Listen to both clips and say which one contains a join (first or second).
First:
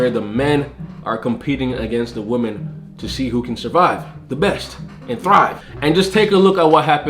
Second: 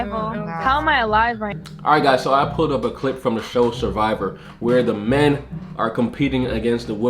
second